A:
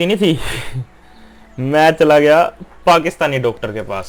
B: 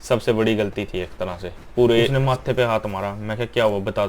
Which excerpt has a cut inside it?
B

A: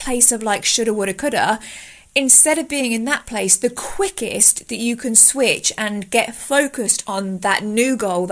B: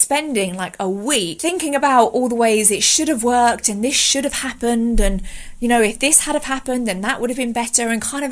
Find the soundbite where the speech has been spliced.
B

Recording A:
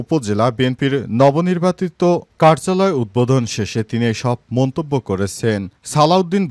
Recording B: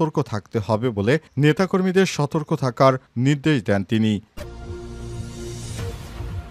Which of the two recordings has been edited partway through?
B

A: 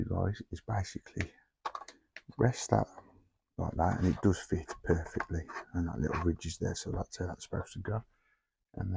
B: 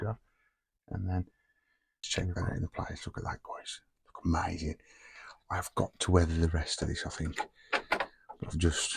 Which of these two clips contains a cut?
B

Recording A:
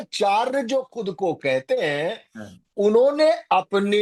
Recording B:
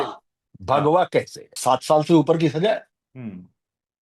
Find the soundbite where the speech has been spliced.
B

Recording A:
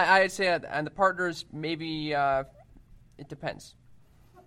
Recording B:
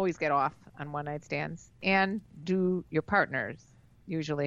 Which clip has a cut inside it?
B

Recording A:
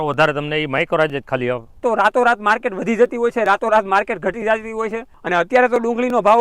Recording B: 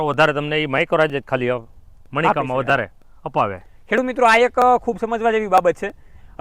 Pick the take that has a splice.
A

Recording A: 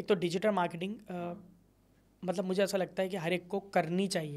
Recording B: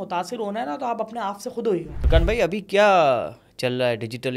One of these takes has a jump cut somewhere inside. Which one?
B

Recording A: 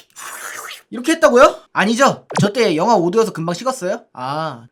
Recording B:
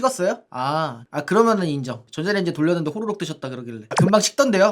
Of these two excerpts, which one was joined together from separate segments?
B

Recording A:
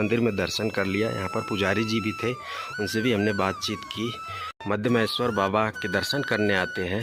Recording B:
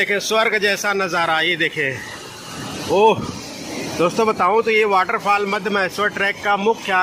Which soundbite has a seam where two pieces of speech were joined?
A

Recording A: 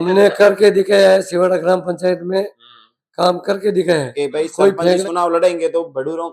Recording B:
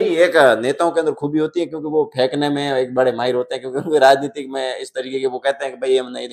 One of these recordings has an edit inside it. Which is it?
A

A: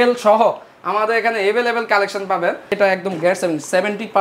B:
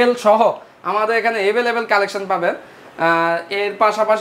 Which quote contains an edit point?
A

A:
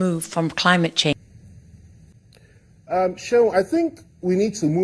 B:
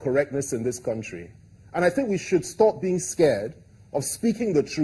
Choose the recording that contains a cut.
A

